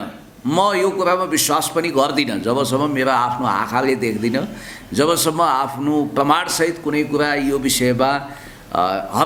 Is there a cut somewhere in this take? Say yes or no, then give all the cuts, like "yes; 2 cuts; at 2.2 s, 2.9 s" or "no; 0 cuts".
no; 0 cuts